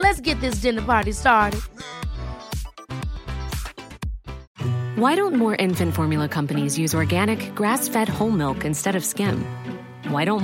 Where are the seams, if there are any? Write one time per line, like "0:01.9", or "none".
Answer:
0:04.5